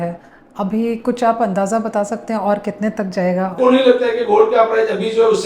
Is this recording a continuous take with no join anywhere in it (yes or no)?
no